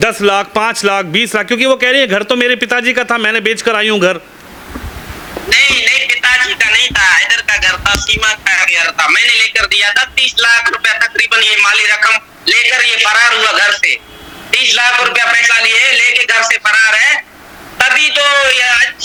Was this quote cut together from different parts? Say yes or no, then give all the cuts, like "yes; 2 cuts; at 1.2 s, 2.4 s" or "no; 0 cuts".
no; 0 cuts